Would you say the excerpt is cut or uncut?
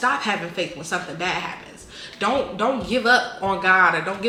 uncut